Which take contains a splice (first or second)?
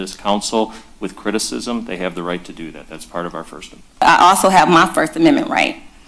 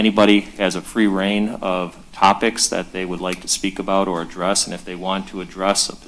first